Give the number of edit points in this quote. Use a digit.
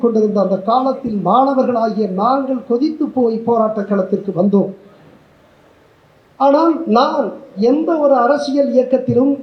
0